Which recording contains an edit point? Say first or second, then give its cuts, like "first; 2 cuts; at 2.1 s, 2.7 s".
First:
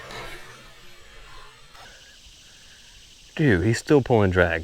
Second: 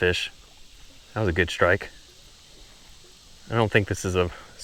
first; 1 cut; at 1.9 s